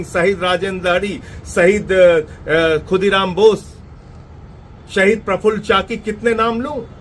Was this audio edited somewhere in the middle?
no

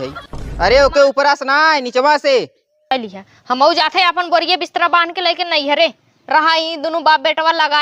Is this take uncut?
no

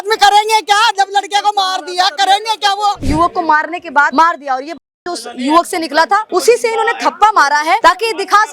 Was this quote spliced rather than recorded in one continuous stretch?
yes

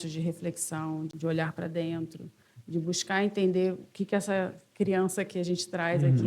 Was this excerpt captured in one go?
no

